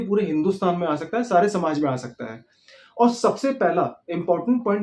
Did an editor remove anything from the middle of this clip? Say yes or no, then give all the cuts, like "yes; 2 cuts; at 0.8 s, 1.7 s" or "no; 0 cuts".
no; 0 cuts